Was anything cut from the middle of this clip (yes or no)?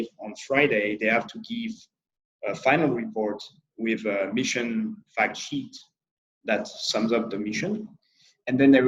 no